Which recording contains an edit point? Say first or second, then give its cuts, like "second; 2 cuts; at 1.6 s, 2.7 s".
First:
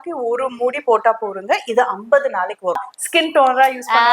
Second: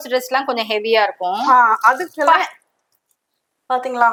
first; 1 cut; at 2.8 s